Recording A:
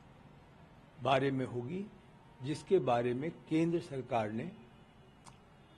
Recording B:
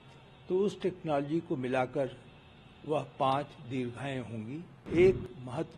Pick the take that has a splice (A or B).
B